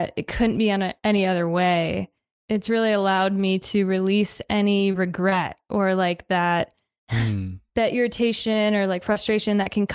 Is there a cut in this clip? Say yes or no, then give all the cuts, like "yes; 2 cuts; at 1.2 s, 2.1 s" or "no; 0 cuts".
no; 0 cuts